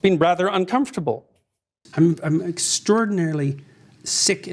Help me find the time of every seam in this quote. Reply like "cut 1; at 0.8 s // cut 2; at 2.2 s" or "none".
cut 1; at 1.8 s